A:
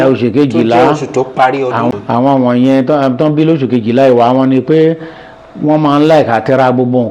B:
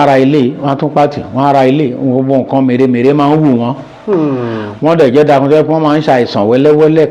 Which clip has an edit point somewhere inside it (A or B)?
A